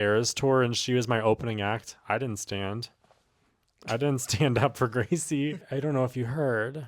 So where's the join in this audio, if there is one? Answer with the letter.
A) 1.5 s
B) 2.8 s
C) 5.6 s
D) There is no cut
C